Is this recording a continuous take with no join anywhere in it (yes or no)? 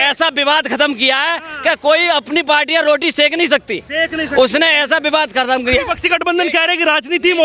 yes